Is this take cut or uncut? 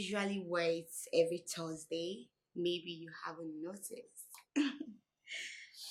uncut